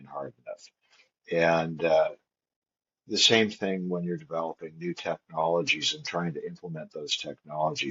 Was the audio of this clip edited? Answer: no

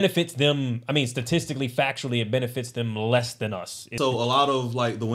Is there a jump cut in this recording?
yes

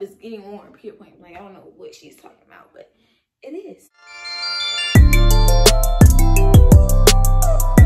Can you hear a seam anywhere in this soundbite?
yes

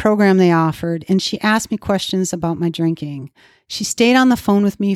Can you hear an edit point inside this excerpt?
no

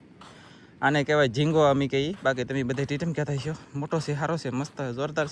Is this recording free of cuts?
yes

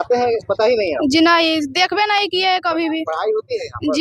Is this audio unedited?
yes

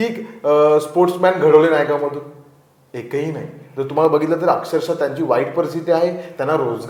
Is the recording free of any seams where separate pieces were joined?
yes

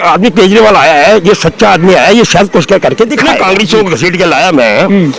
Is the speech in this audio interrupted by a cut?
yes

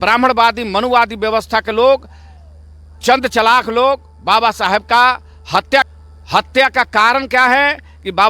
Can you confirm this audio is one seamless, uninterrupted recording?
no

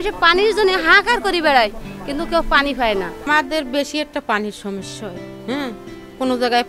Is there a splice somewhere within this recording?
yes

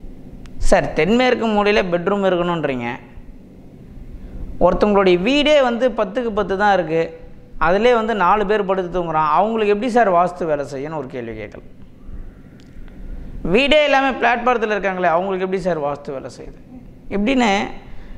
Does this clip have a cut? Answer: no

